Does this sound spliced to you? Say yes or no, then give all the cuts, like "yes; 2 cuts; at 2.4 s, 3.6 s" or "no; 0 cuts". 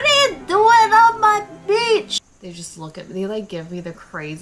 yes; 1 cut; at 2.3 s